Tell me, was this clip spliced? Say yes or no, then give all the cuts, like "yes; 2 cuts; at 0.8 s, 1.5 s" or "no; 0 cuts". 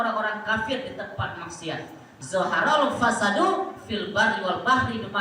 yes; 1 cut; at 2.1 s